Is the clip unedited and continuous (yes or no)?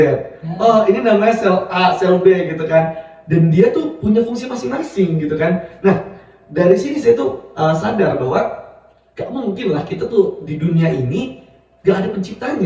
yes